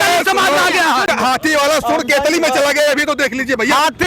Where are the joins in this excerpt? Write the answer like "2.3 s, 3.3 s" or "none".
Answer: 1.1 s

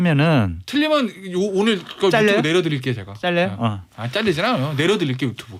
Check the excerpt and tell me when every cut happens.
none

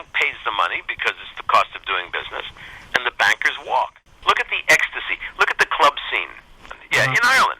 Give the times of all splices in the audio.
4.0 s, 6.6 s

